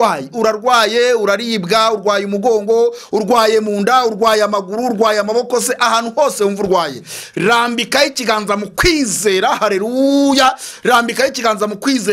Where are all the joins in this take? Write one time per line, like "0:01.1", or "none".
none